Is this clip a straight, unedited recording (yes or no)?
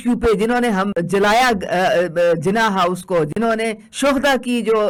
yes